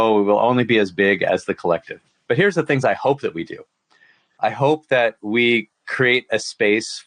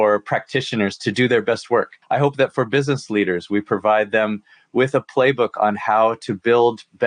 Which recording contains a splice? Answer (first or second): second